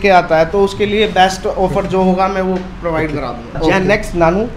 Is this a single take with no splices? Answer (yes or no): no